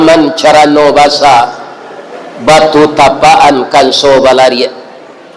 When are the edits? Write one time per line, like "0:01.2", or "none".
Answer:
none